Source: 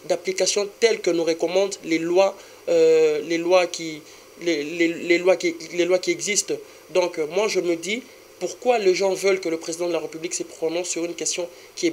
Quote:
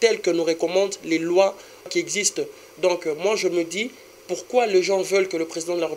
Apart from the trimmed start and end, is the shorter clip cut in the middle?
yes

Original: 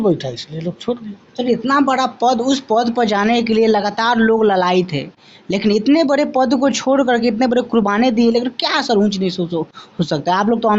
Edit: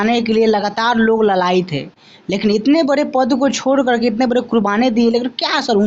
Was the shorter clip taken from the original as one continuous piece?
yes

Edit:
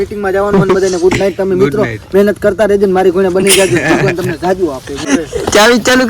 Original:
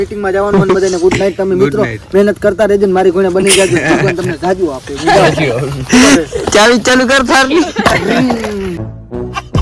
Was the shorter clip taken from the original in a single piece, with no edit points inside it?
no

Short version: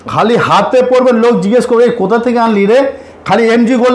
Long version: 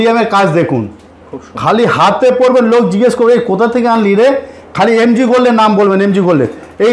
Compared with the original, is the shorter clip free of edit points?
yes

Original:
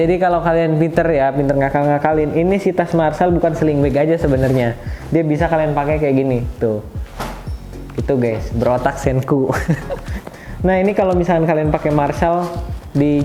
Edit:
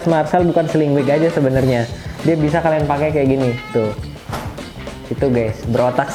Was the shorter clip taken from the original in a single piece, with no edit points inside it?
yes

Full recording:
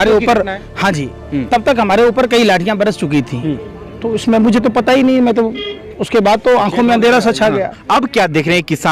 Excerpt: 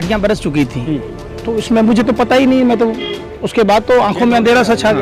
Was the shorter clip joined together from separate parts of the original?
no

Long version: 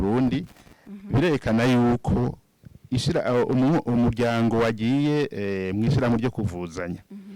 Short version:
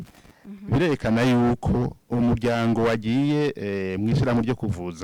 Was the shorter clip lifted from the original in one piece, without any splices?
no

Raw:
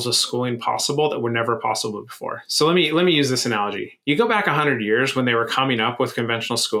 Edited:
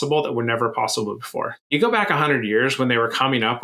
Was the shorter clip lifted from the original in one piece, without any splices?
no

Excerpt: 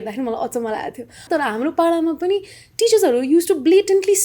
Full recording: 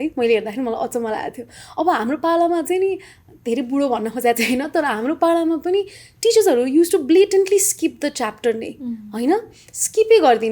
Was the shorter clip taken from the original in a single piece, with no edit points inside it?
no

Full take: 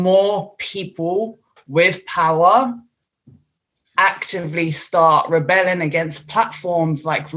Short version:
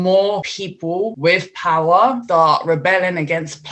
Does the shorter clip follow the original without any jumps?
no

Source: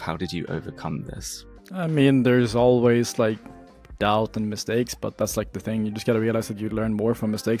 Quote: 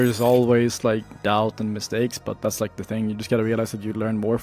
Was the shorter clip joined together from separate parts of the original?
yes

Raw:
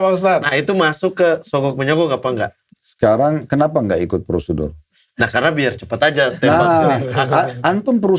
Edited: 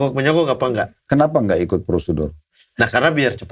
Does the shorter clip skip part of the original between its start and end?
yes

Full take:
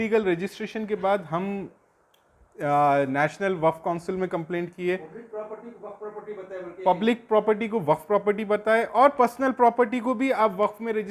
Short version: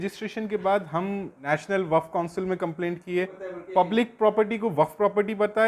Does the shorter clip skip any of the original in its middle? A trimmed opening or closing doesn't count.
yes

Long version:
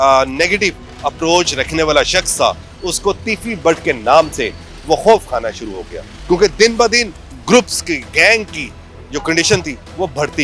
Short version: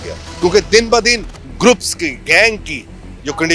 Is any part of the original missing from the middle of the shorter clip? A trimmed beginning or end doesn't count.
no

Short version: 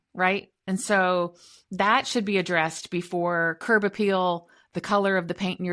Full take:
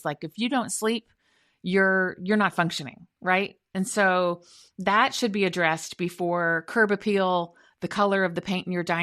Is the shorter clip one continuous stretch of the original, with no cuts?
yes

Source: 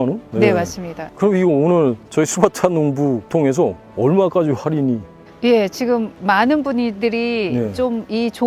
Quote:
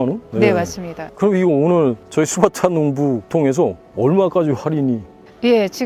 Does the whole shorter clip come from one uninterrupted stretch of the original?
yes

